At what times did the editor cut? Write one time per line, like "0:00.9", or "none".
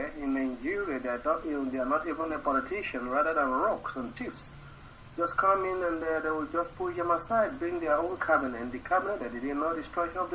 none